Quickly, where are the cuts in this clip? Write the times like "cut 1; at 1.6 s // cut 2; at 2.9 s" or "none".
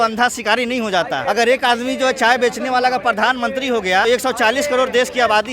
cut 1; at 1.2 s // cut 2; at 4.0 s